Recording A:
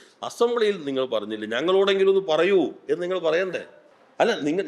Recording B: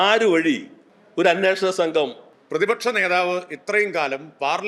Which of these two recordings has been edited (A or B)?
B